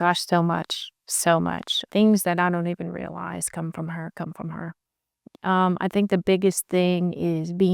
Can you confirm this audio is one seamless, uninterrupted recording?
no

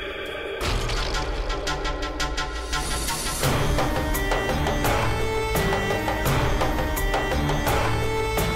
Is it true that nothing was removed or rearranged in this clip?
yes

